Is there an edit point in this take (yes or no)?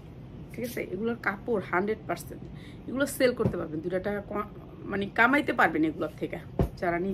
no